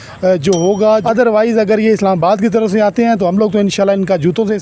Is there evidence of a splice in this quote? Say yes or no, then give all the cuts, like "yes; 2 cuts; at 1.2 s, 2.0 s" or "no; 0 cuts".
yes; 1 cut; at 1.0 s